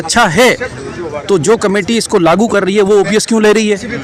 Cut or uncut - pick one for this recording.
uncut